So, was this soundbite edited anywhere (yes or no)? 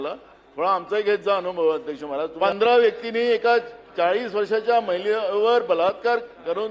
yes